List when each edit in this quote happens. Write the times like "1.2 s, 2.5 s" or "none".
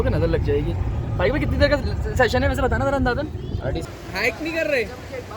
3.8 s

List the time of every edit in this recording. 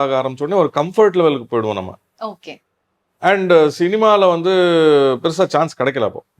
none

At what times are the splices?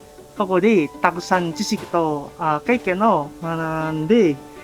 3.3 s

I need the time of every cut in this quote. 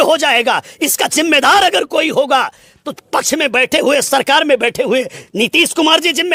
none

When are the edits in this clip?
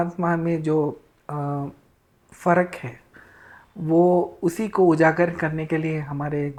none

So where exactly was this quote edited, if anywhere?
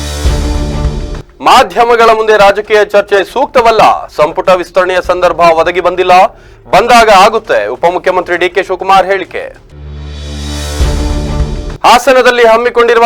1.2 s

